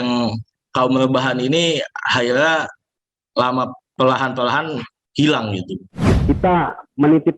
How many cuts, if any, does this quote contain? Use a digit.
1